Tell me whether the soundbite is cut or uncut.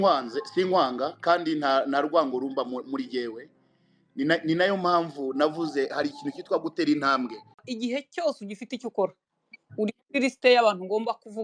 cut